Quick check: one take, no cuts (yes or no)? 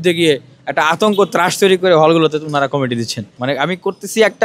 no